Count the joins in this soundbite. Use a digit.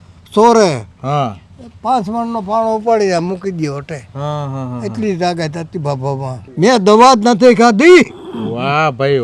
1